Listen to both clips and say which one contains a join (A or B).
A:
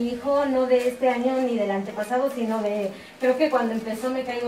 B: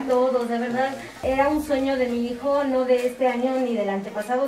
B